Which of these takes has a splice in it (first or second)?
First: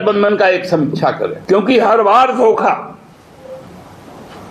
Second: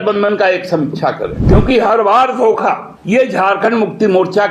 second